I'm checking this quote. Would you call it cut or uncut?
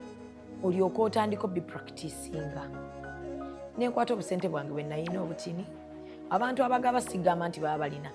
cut